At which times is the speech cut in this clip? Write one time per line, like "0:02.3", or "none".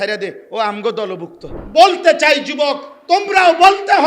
0:01.5